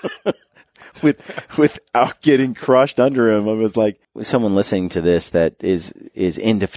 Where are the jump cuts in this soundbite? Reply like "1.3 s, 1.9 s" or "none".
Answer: 4.1 s